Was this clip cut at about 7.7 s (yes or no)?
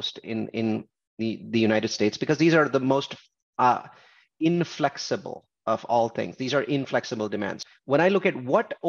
yes